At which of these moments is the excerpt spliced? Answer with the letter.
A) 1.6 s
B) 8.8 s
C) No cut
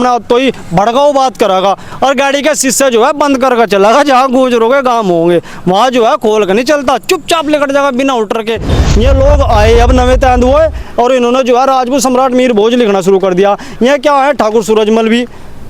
B